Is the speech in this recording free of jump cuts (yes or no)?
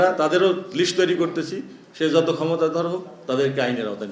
yes